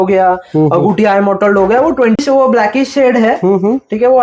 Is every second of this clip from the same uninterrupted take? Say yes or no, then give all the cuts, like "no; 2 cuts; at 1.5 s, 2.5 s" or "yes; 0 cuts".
no; 1 cut; at 2.2 s